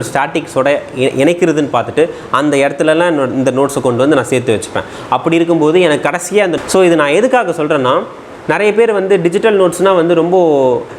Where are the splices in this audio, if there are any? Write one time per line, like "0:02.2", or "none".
0:06.5